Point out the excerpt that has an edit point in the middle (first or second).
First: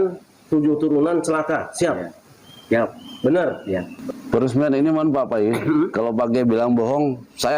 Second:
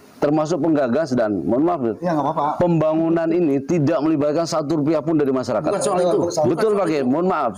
first